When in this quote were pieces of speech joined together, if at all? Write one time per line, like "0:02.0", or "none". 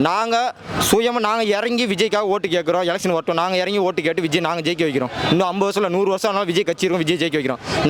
none